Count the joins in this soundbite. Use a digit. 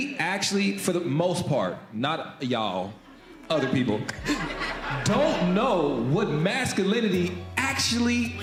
0